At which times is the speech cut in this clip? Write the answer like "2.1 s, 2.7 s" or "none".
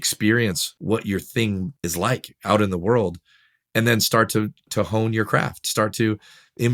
none